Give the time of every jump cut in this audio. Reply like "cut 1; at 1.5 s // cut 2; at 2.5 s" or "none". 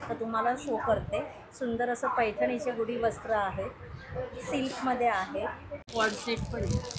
cut 1; at 5.9 s

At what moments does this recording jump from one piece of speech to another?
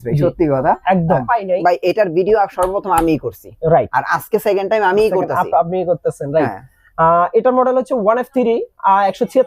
cut 1; at 1.2 s

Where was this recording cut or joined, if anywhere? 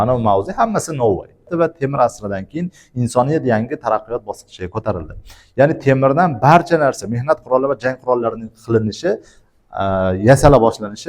cut 1; at 1.5 s

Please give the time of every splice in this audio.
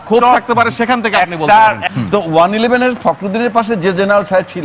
cut 1; at 1.9 s

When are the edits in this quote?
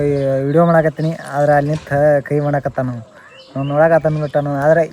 none

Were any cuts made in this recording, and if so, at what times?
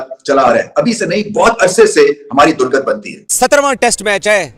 cut 1; at 3.3 s

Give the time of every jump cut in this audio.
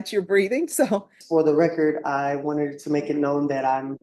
cut 1; at 1.2 s

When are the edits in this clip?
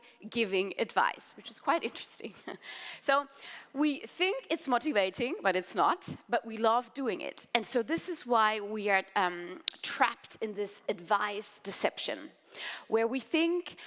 none

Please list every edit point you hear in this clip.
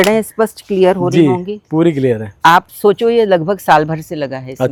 none

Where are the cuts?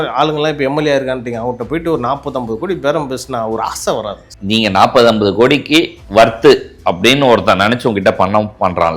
cut 1; at 4.2 s

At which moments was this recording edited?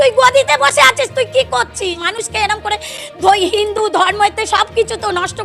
cut 1; at 2.0 s

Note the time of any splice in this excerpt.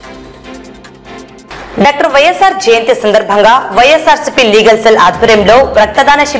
none

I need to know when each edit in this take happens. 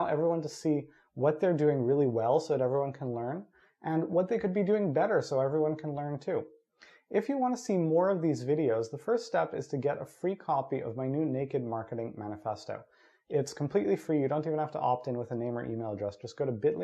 cut 1; at 2.0 s

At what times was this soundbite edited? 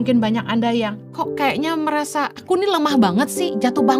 cut 1; at 1.0 s // cut 2; at 2.4 s

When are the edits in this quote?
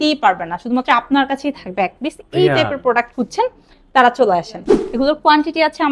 cut 1; at 4.8 s

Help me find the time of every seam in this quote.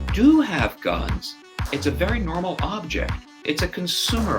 cut 1; at 3.4 s

